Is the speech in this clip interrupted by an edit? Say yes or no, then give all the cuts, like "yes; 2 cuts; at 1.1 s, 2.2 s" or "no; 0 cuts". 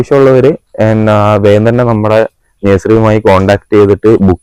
no; 0 cuts